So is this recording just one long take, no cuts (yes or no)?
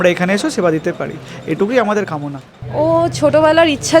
yes